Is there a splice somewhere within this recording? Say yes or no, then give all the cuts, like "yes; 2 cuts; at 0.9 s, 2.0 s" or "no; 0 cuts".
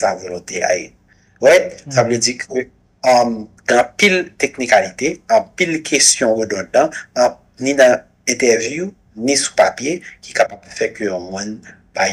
no; 0 cuts